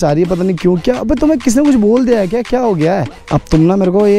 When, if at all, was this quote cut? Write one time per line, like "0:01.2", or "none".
0:03.2